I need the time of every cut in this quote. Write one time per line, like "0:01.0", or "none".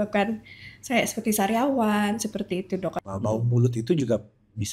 0:03.0